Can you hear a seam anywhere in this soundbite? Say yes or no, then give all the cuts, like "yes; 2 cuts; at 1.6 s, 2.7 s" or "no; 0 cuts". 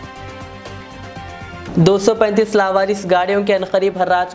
no; 0 cuts